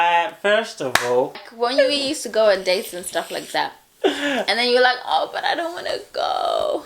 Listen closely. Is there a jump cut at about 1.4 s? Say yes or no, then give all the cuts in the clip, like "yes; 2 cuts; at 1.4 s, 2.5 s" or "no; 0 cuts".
yes; 1 cut; at 1.4 s